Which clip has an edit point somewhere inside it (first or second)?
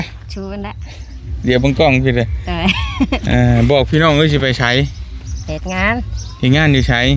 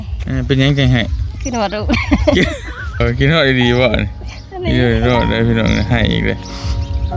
second